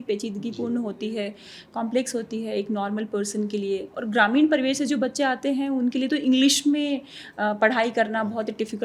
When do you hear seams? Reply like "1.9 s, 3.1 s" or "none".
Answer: none